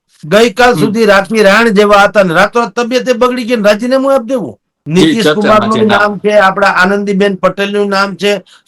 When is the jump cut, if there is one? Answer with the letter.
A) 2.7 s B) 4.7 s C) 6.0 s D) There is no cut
B